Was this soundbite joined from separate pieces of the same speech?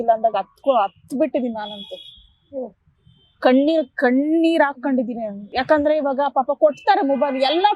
no; 0 cuts

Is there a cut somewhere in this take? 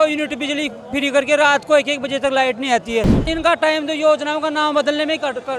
yes; 1 cut; at 3.3 s

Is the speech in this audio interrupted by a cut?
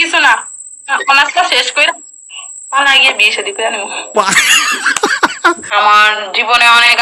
yes; 1 cut; at 5.6 s

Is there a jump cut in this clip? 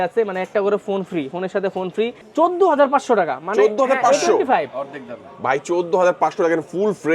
yes; 1 cut; at 2.2 s

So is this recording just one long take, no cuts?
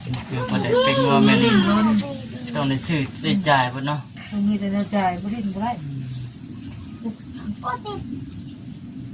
yes; 0 cuts

